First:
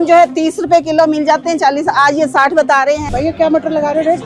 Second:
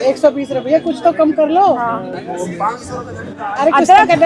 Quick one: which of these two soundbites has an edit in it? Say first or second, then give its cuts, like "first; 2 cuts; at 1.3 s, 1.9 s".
first; 1 cut; at 3.0 s